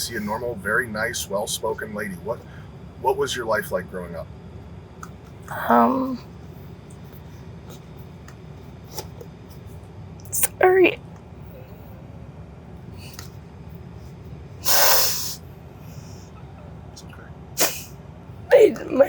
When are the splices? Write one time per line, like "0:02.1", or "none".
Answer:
none